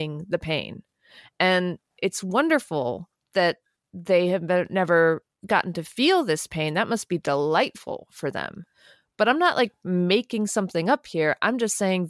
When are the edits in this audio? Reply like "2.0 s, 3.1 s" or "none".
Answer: none